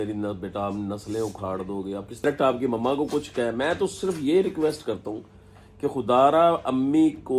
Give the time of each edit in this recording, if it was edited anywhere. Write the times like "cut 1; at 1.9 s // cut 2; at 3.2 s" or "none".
cut 1; at 2.2 s

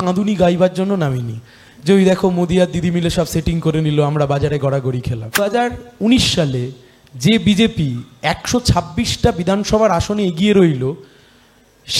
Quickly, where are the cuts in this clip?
cut 1; at 5.4 s

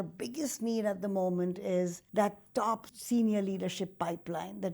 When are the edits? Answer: cut 1; at 2.0 s // cut 2; at 2.9 s

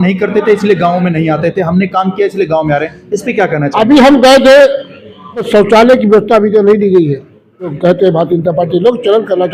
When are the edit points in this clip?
cut 1; at 5.5 s // cut 2; at 7.7 s

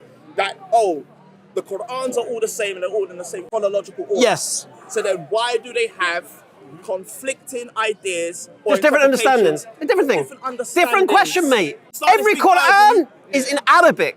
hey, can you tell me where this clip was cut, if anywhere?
cut 1; at 3.4 s // cut 2; at 11.9 s

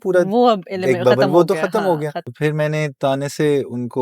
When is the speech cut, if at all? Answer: cut 1; at 2.2 s

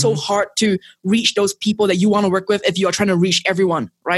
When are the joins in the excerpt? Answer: none

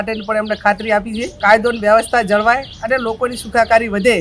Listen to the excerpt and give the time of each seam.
cut 1; at 1.2 s

